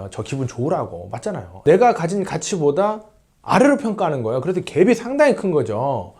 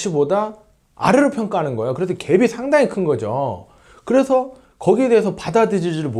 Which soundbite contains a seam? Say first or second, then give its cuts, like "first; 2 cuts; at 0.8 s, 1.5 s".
first; 1 cut; at 1.5 s